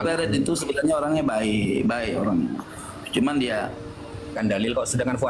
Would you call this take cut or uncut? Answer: cut